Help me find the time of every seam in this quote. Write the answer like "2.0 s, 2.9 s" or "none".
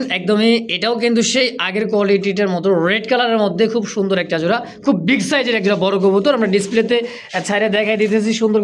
none